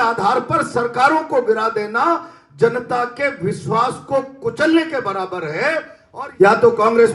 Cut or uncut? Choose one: cut